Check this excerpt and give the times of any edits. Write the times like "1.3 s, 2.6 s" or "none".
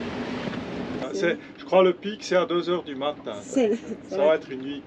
1.0 s